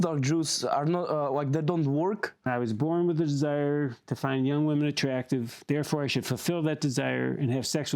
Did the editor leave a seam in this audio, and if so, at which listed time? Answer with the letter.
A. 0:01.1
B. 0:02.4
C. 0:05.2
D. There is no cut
B